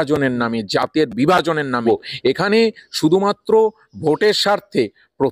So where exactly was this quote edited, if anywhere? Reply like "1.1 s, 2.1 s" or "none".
1.8 s